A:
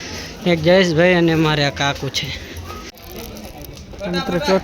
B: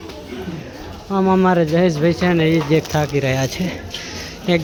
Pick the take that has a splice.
A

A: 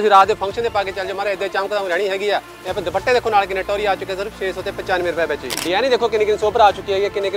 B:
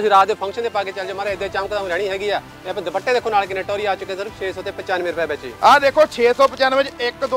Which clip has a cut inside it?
A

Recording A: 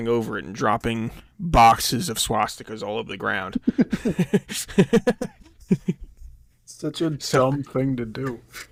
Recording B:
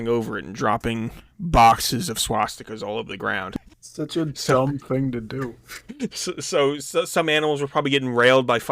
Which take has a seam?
B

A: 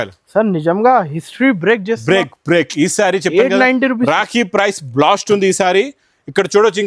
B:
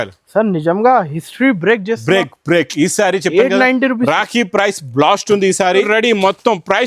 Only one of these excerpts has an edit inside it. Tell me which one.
B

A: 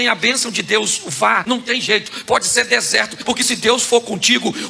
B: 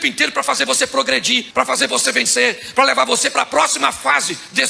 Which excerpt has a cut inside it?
A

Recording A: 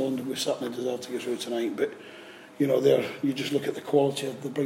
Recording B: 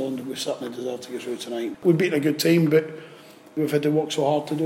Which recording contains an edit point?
B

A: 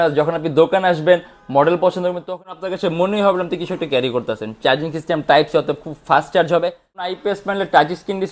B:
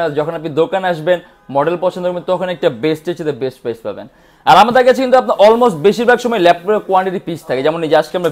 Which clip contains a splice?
A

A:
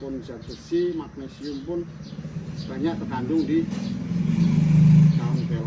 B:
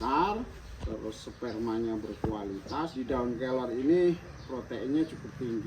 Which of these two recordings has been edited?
B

